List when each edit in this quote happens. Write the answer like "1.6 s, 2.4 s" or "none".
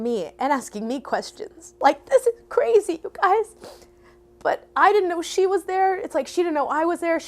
1.7 s